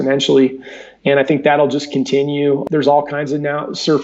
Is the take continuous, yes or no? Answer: no